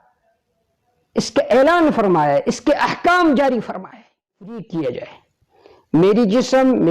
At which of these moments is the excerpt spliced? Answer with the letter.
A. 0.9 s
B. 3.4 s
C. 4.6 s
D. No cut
C